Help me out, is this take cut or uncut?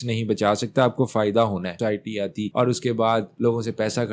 cut